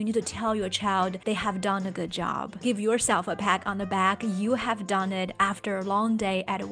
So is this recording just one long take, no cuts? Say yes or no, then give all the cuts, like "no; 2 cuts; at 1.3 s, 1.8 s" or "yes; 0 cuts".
no; 2 cuts; at 1.2 s, 2.6 s